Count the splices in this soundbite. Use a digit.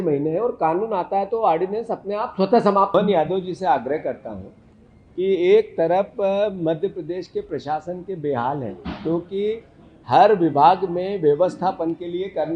1